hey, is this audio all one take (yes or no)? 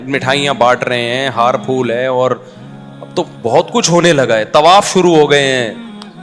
yes